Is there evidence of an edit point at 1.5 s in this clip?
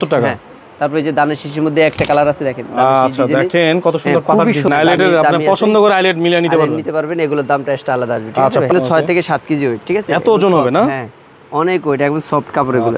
no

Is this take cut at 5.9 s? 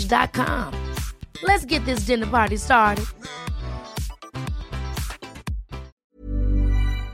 yes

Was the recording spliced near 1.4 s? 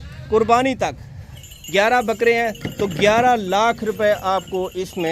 yes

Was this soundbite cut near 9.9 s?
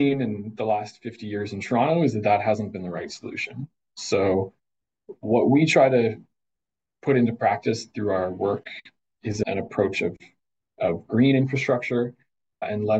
no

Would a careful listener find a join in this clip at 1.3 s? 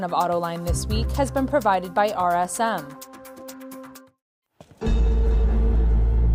no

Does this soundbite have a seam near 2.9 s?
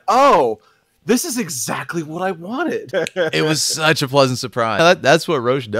yes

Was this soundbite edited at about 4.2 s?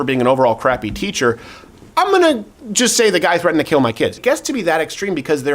yes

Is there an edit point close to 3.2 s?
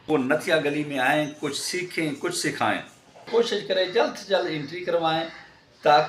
yes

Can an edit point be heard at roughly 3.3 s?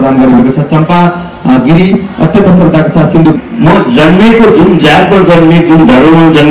yes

